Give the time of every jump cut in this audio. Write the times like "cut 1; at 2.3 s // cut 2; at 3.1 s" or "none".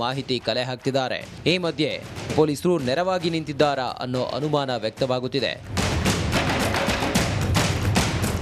cut 1; at 4.1 s